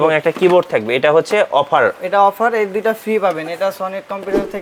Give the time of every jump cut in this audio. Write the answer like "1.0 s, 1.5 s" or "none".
none

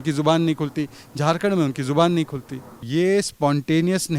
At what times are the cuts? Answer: 2.8 s

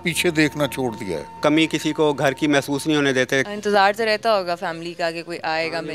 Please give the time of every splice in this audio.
1.4 s, 3.5 s

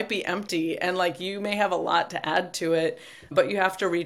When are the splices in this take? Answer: none

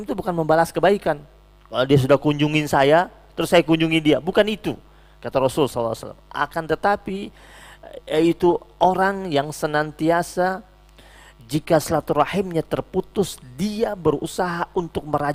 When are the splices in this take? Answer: none

